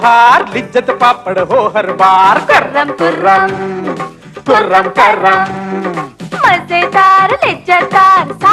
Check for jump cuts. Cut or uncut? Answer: uncut